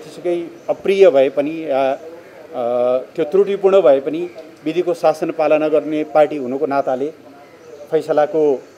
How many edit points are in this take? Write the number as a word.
zero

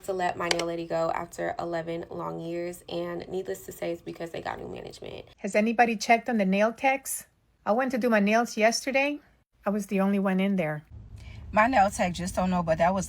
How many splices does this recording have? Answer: two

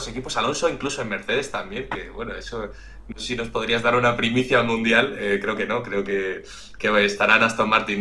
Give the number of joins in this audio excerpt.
zero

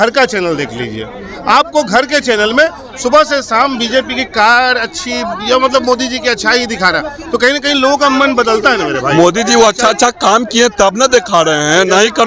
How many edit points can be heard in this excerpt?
zero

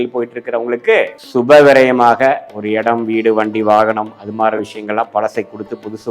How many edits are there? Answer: one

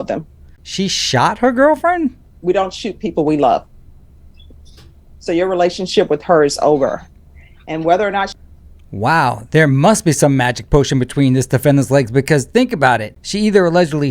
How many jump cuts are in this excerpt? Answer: one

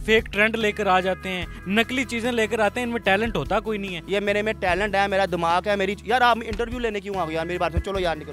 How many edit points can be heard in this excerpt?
two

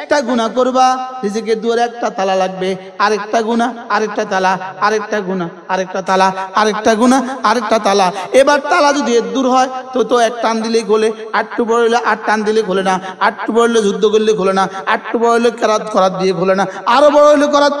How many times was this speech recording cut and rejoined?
zero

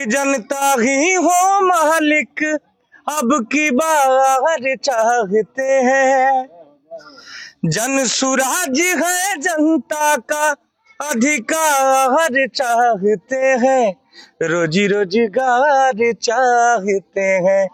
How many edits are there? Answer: zero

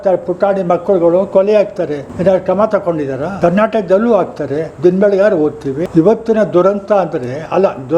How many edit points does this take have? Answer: three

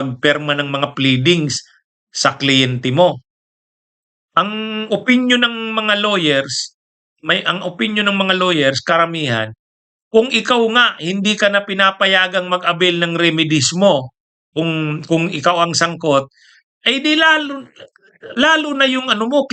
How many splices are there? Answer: zero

